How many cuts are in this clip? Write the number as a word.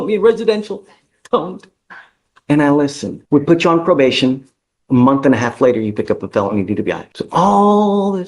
two